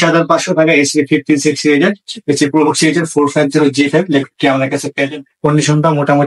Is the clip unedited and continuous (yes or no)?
no